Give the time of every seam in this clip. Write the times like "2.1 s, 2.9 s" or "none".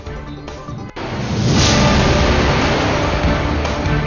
0.9 s